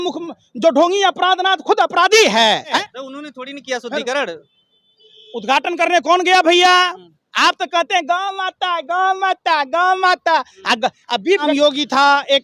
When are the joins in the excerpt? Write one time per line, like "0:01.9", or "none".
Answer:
0:02.8
0:11.5